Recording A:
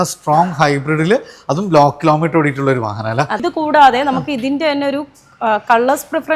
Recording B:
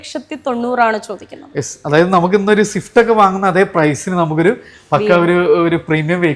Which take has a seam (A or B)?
A